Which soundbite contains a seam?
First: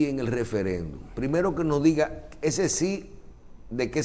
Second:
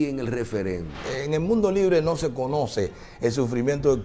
second; 1 cut; at 1.1 s

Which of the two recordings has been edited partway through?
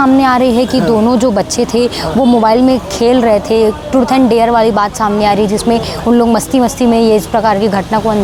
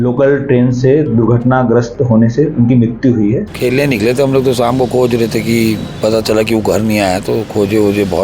second; 1 cut; at 3.4 s

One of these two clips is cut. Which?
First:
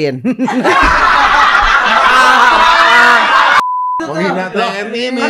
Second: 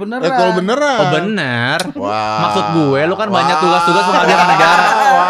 first; 1 cut; at 3.6 s

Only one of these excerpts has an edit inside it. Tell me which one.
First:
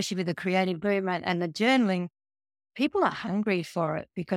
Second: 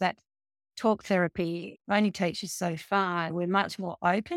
second; 2 cuts; at 1.9 s, 3.3 s

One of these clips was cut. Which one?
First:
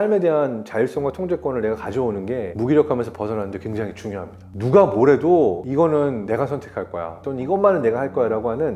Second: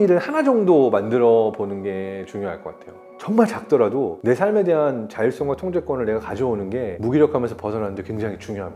second; 1 cut; at 3.0 s

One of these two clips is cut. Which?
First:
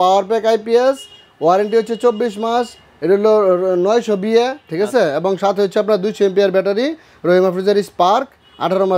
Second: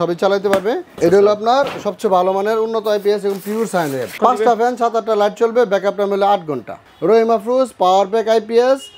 second; 3 cuts; at 0.9 s, 4.1 s, 6.8 s

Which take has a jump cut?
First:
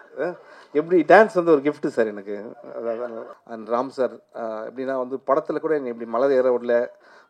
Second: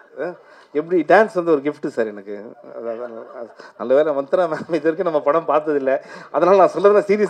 first; 1 cut; at 3.3 s

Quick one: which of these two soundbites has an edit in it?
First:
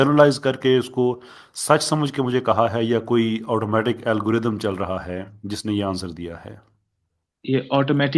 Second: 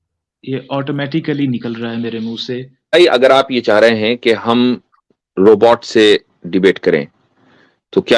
second; 1 cut; at 2.9 s

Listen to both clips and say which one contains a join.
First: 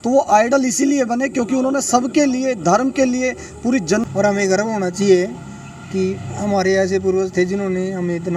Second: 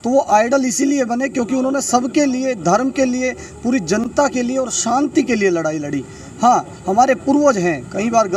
first; 1 cut; at 4.1 s

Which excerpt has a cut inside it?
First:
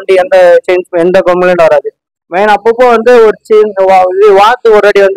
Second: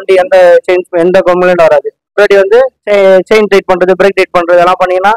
second; 1 cut; at 2.2 s

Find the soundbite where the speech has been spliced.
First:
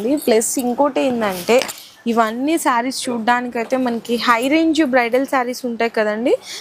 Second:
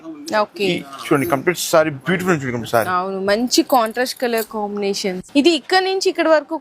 second; 1 cut; at 5.2 s

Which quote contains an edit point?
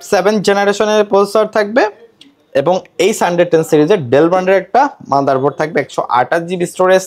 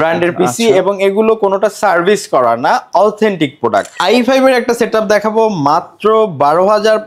second; 1 cut; at 4.0 s

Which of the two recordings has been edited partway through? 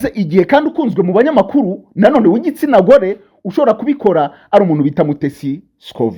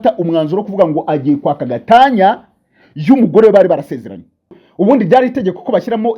second; 1 cut; at 4.6 s

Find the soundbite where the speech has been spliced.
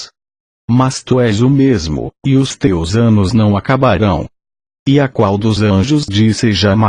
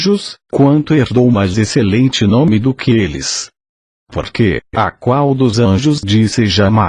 first; 1 cut; at 5.9 s

